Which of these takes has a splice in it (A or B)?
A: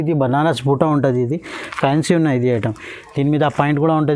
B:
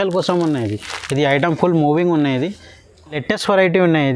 B